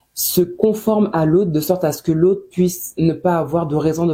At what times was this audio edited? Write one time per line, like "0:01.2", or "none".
none